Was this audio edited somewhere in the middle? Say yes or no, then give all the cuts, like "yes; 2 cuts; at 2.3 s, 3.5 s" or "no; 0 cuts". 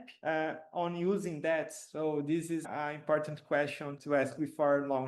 yes; 2 cuts; at 2.6 s, 3.9 s